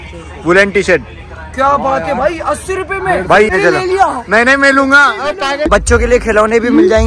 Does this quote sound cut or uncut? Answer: cut